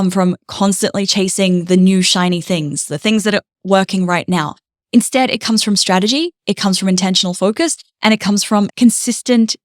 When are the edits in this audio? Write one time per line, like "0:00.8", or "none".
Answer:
0:08.7